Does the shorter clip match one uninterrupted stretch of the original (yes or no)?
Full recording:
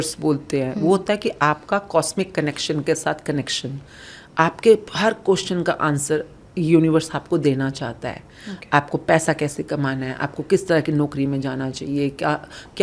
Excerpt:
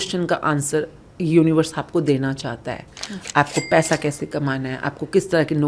yes